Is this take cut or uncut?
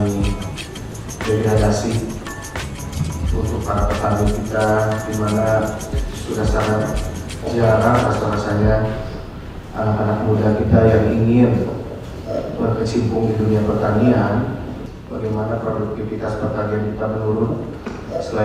uncut